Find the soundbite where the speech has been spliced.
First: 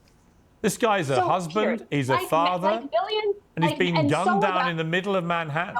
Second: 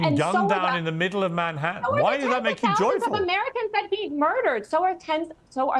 first; 1 cut; at 1.5 s

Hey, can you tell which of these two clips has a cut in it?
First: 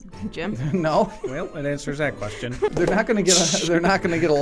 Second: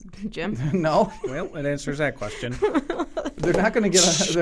first; 1 cut; at 2.7 s

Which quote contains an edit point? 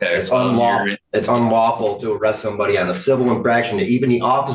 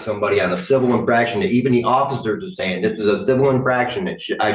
first; 1 cut; at 1.0 s

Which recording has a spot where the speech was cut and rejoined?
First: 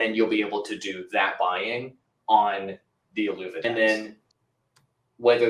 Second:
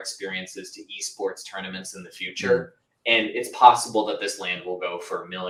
first; 1 cut; at 3.6 s

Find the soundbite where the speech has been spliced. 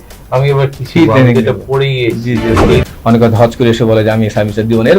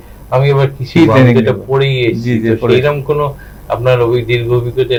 first; 1 cut; at 2.8 s

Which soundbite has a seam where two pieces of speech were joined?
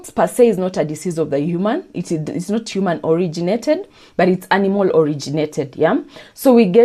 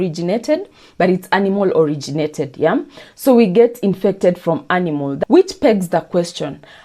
second; 1 cut; at 5.1 s

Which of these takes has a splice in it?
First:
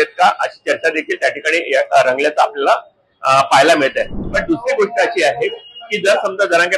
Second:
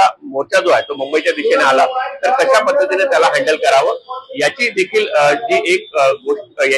first; 1 cut; at 4.3 s

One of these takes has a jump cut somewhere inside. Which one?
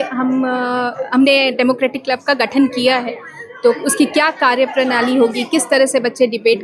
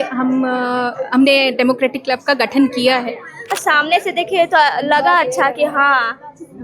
second; 1 cut; at 3.6 s

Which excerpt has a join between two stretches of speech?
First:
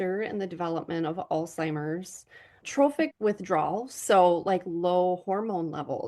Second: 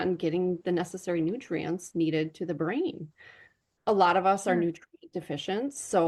first; 1 cut; at 3.1 s

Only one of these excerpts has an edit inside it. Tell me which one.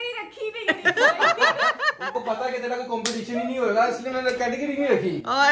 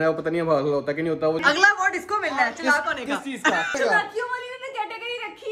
second; 2 cuts; at 1.4 s, 3.7 s

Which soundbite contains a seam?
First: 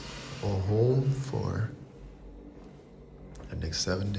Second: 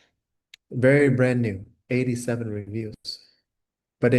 second; 1 cut; at 1.7 s

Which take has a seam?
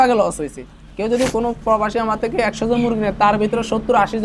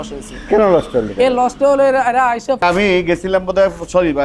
second; 1 cut; at 2.6 s

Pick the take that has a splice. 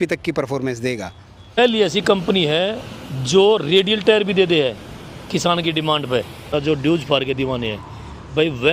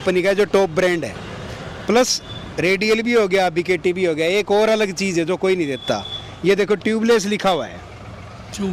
first; 2 cuts; at 1.6 s, 6.5 s

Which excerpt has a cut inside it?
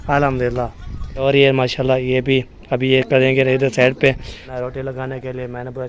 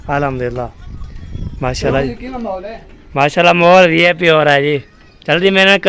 first; 2 cuts; at 1.2 s, 4.4 s

